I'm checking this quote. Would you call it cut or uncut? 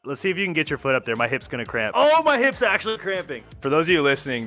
cut